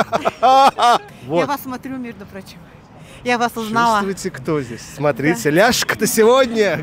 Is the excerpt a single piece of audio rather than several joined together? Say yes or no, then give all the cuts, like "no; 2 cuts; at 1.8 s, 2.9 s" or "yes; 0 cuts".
no; 1 cut; at 1.1 s